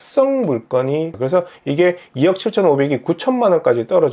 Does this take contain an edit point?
yes; 1 cut; at 1.1 s

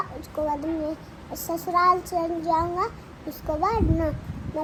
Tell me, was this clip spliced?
no; 0 cuts

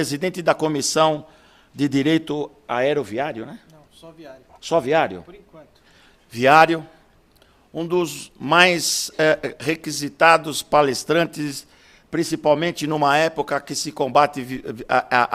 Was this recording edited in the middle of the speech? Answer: yes; 1 cut; at 1.7 s

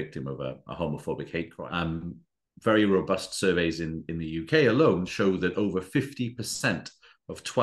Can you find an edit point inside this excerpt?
yes; 1 cut; at 1.6 s

